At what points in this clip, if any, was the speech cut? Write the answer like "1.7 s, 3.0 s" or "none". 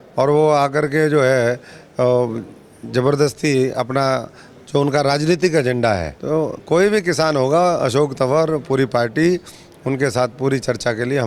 6.1 s